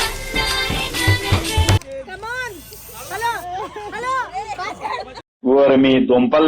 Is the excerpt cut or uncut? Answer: cut